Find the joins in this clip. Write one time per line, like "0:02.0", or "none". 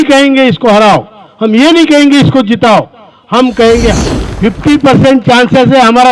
0:04.0